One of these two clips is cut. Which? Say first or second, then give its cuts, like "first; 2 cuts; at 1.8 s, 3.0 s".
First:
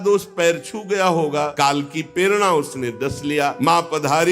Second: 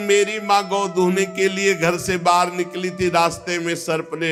first; 2 cuts; at 1.5 s, 3.6 s